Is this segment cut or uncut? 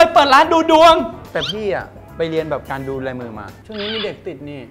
cut